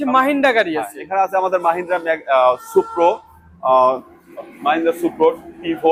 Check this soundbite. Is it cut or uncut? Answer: uncut